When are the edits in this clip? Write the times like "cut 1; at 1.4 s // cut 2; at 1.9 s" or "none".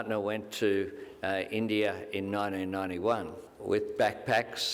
cut 1; at 3.5 s